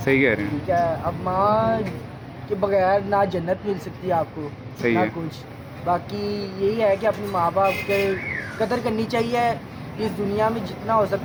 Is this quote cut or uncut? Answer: uncut